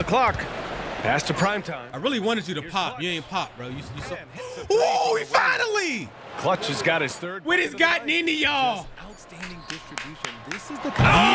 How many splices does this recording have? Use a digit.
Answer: 0